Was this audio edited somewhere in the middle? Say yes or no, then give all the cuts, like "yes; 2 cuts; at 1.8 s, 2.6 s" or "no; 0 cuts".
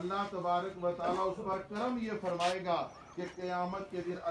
no; 0 cuts